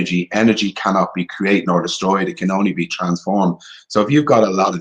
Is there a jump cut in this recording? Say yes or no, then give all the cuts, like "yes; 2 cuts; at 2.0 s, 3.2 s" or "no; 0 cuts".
no; 0 cuts